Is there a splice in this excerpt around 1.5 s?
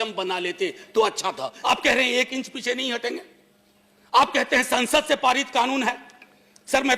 yes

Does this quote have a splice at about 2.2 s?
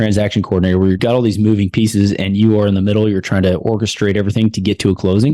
no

